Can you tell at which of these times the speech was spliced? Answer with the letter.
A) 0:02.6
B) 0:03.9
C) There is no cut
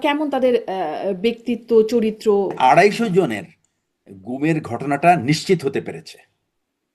A